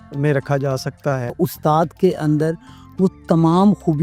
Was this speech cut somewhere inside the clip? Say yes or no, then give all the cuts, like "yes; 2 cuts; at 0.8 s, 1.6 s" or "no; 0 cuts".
yes; 1 cut; at 1.4 s